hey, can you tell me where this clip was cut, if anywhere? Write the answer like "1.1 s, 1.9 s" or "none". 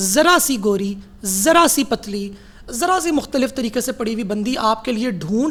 none